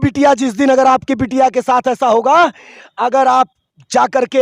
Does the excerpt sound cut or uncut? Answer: uncut